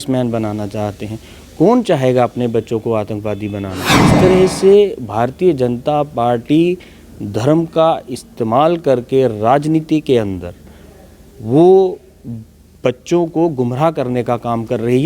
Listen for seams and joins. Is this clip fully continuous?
no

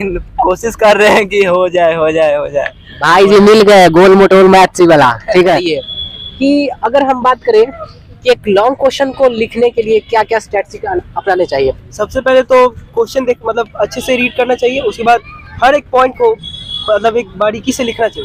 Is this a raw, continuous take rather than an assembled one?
yes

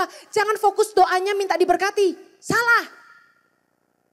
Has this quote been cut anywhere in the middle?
no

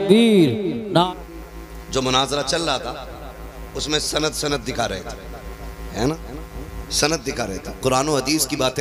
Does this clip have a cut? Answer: yes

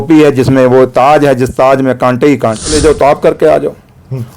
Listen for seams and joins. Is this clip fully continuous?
no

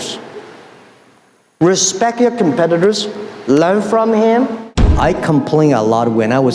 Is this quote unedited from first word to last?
no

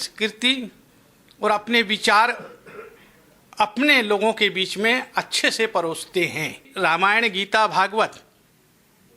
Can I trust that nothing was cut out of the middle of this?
no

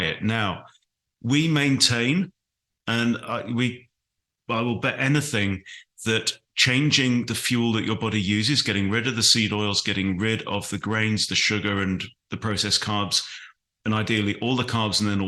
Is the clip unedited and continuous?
yes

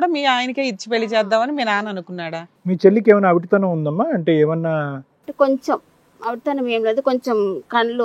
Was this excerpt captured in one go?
no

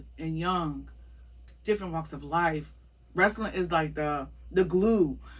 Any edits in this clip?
yes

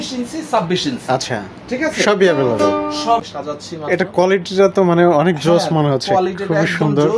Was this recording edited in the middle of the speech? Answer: yes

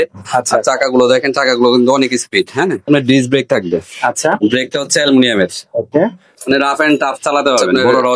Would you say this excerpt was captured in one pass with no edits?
no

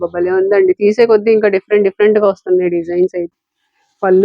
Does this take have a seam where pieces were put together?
yes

